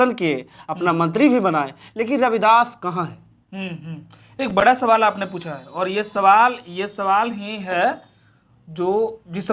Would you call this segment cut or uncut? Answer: uncut